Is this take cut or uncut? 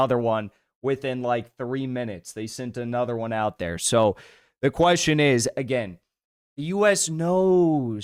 uncut